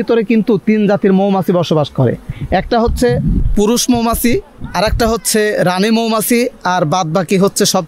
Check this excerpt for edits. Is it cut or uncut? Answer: uncut